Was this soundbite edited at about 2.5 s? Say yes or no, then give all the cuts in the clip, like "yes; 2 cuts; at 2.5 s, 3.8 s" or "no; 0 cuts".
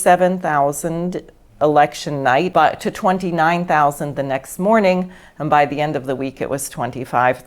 yes; 1 cut; at 2.5 s